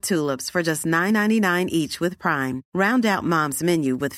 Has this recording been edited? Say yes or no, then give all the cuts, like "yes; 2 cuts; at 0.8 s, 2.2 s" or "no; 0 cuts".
no; 0 cuts